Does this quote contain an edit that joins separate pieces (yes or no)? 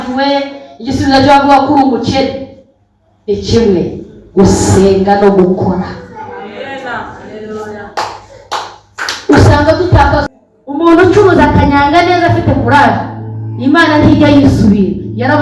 yes